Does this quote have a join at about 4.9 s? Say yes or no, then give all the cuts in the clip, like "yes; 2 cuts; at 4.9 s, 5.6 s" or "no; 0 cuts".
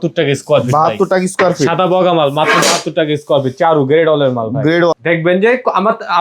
yes; 1 cut; at 4.9 s